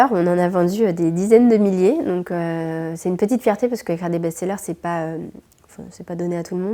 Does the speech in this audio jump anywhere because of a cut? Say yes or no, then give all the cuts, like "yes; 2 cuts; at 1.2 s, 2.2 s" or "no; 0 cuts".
no; 0 cuts